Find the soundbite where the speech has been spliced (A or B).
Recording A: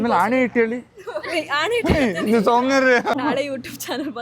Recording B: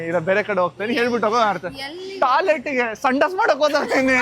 A